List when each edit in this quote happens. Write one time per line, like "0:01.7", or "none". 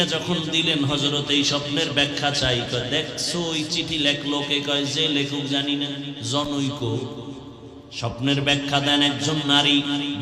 none